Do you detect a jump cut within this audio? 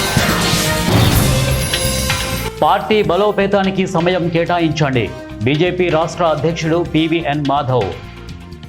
yes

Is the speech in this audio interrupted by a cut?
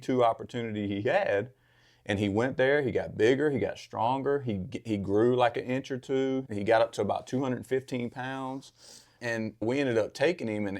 yes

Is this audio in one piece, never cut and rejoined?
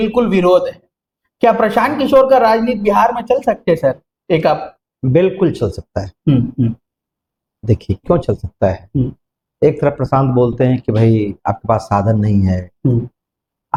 yes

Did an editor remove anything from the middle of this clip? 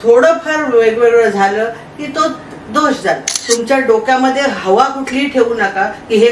yes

